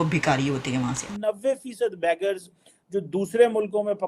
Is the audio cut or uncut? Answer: cut